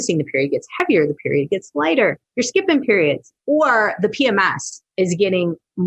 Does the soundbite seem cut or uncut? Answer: cut